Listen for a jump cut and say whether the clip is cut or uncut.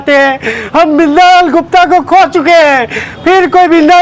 uncut